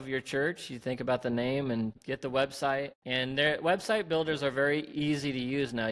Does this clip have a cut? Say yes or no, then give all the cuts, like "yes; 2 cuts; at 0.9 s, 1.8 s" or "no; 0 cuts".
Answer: yes; 2 cuts; at 2.0 s, 3.0 s